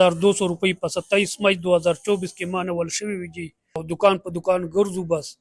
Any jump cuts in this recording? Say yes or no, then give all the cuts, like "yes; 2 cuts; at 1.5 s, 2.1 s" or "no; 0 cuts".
yes; 1 cut; at 3.8 s